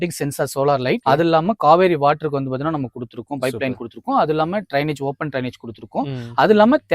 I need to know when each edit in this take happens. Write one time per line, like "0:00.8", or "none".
none